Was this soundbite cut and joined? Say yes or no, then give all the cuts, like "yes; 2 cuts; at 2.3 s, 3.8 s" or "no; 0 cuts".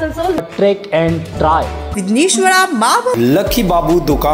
yes; 1 cut; at 3.1 s